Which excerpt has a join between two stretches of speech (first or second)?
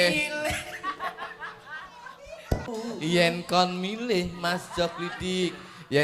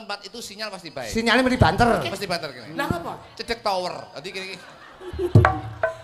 first